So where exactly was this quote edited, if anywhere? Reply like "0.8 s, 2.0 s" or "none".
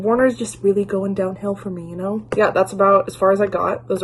none